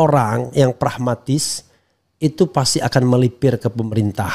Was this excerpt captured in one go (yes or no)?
yes